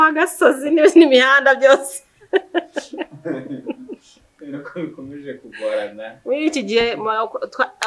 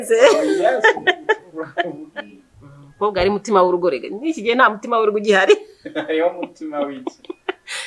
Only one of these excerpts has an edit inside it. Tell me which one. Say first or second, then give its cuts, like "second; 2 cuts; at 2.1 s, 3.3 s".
second; 1 cut; at 2.0 s